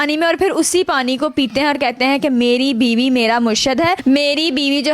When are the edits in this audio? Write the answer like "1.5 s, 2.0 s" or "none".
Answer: none